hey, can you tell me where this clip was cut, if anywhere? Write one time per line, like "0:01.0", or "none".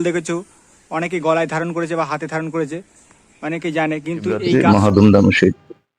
0:04.5